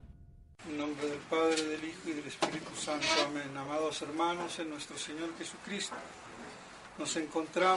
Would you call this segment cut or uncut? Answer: uncut